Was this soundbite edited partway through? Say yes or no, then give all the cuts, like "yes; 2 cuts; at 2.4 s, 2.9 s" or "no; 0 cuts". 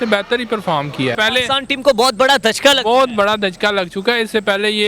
yes; 1 cut; at 1.2 s